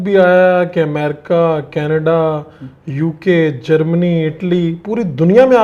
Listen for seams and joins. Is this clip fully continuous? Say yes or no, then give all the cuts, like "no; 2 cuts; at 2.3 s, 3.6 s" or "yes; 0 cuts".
yes; 0 cuts